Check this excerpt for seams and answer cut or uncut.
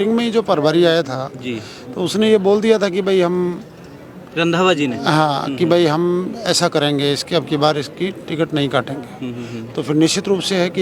uncut